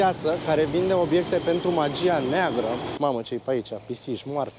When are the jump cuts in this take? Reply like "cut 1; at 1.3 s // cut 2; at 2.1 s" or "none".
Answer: cut 1; at 2.9 s